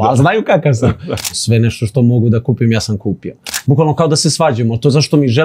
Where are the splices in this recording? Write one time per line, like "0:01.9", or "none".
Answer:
0:01.3
0:03.5